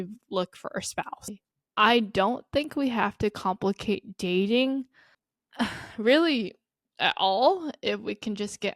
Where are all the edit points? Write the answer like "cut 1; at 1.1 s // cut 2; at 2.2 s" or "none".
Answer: cut 1; at 1.3 s